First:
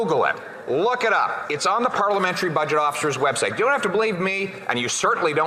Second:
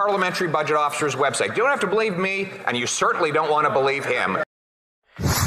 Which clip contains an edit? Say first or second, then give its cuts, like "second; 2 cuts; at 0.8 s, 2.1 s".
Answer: second; 1 cut; at 4.4 s